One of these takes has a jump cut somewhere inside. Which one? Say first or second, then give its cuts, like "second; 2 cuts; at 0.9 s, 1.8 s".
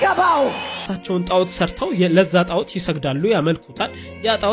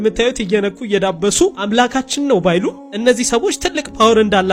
first; 1 cut; at 0.9 s